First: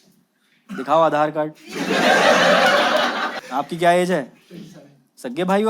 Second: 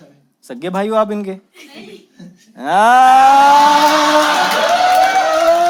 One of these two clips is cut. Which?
first; 1 cut; at 3.4 s

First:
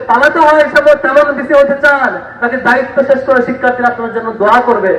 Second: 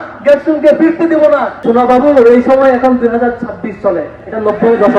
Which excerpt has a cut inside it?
second; 1 cut; at 1.5 s

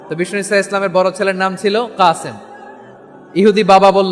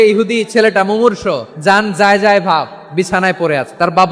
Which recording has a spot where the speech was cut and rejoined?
second; 1 cut; at 1.5 s

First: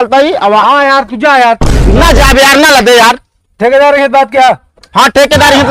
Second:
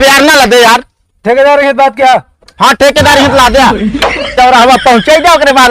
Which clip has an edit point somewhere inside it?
second; 1 cut; at 4.3 s

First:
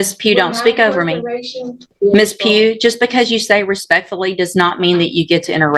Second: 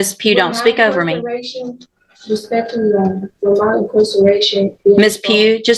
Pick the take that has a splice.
first; 1 cut; at 1.9 s

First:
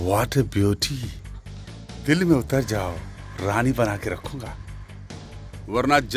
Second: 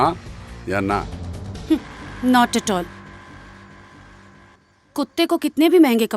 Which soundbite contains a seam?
second; 1 cut; at 4.6 s

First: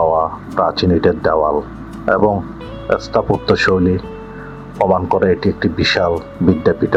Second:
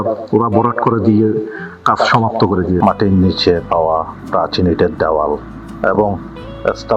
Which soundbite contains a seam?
second; 1 cut; at 2.8 s

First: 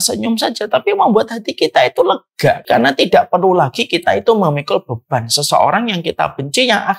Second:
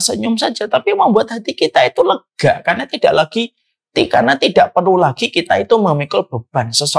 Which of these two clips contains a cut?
first; 1 cut; at 2.6 s

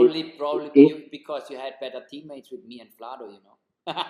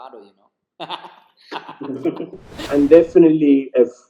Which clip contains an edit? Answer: second; 1 cut; at 2.7 s

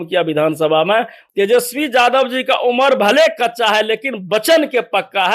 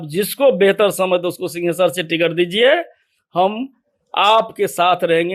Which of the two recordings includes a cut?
first; 1 cut; at 1.2 s

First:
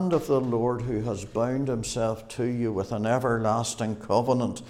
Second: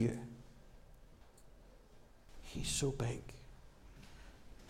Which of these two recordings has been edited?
second; 2 cuts; at 1.2 s, 2.3 s

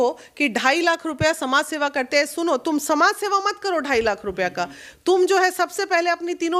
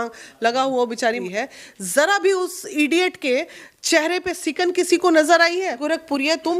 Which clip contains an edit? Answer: second; 2 cuts; at 1.2 s, 5.8 s

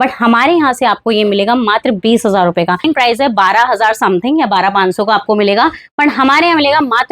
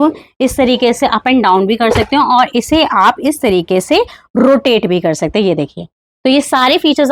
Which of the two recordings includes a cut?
first; 1 cut; at 2.8 s

